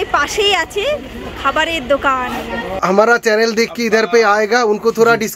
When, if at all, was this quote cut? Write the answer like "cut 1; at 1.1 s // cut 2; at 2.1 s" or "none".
cut 1; at 2.8 s